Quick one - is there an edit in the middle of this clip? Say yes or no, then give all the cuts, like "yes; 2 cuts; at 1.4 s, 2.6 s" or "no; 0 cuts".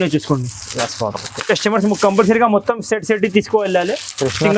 no; 0 cuts